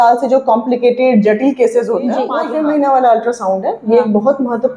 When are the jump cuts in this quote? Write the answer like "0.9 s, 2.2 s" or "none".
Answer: 2.4 s

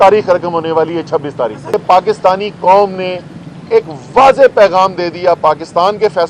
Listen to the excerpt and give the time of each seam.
1.7 s

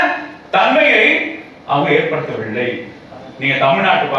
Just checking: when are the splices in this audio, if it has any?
none

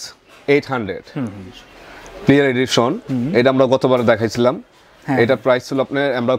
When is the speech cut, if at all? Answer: none

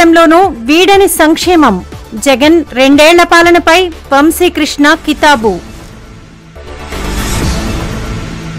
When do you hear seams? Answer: none

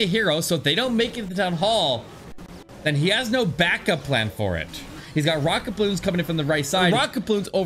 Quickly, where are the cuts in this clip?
5.0 s, 6.8 s

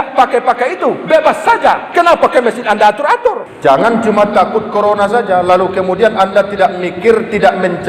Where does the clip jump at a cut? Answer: 3.5 s

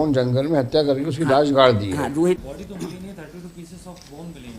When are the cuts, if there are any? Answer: 2.4 s

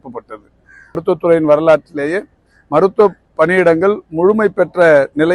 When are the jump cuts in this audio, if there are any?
1.0 s

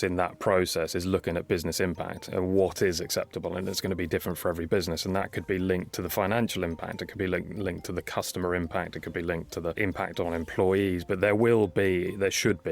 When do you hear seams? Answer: 9.7 s

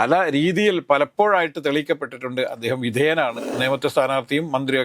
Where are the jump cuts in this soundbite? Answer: 3.6 s

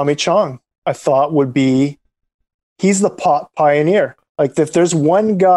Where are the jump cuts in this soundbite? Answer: 4.2 s

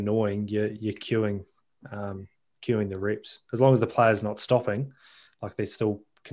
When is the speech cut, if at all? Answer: none

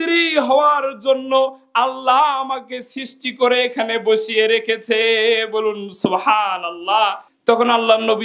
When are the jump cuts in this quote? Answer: 7.3 s

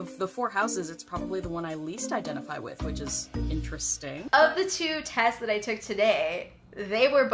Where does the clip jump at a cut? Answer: 4.2 s

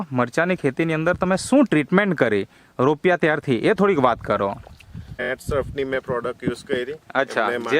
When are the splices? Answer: 5.2 s

